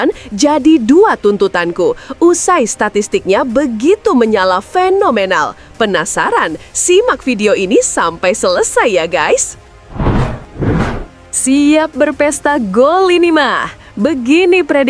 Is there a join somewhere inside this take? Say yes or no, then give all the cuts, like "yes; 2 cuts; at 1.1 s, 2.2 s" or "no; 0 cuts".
yes; 1 cut; at 9.7 s